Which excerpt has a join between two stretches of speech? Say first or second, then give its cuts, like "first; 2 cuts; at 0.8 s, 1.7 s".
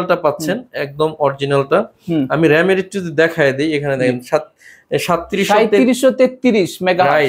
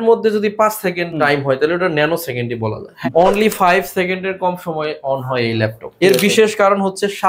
second; 3 cuts; at 1.1 s, 3.0 s, 6.0 s